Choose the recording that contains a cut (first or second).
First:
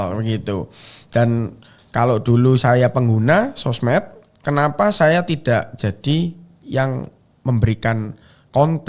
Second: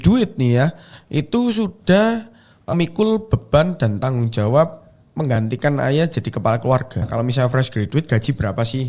second